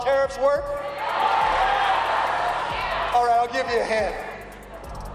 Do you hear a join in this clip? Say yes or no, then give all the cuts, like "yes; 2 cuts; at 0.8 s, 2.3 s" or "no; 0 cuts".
no; 0 cuts